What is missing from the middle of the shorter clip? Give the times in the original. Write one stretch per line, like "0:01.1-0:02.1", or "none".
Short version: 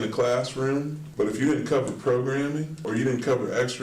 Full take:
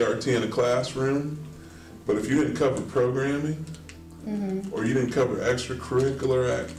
0:01.4-0:01.9
0:03.7-0:04.7